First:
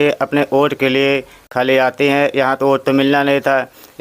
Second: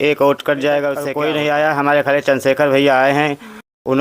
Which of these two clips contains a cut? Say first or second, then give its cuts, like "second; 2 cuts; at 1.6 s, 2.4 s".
second; 1 cut; at 1.0 s